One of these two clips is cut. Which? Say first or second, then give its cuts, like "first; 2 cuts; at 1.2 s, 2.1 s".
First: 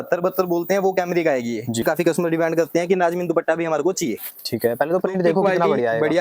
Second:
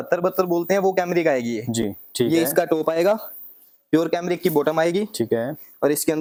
first; 1 cut; at 1.8 s